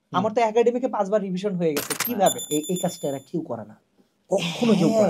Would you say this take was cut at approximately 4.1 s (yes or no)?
no